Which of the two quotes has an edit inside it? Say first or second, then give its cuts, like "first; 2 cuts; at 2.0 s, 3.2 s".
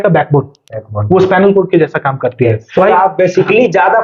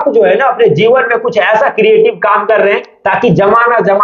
first; 1 cut; at 2.6 s